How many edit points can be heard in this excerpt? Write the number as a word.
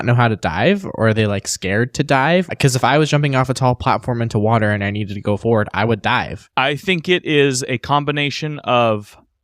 two